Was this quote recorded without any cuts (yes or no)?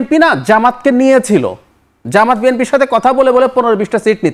yes